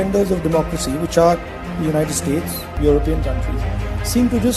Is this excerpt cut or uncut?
uncut